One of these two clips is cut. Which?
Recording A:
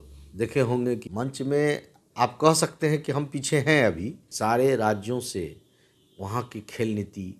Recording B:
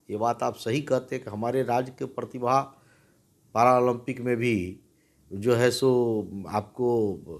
A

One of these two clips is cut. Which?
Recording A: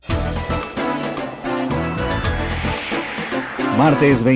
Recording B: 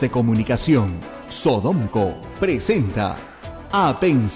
A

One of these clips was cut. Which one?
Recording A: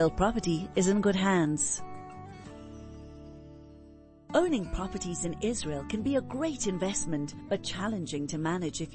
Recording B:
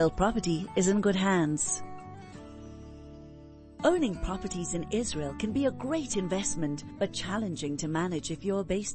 B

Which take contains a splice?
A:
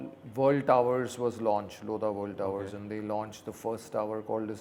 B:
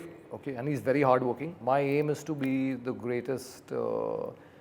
B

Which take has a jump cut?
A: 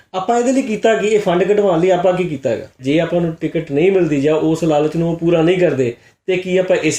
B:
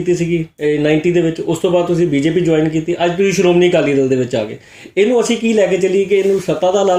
A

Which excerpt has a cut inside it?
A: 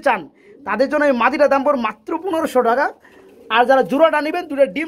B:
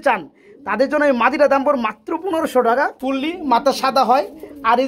B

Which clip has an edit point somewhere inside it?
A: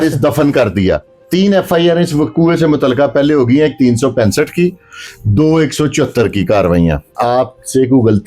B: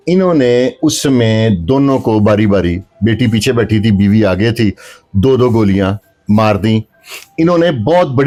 A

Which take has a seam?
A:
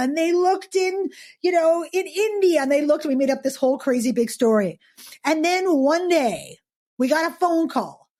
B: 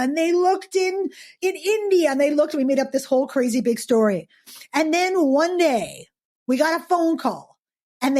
B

